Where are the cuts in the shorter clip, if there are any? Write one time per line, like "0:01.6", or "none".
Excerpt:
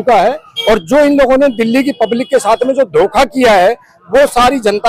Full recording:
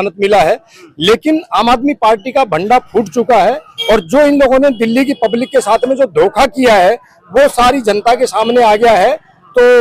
none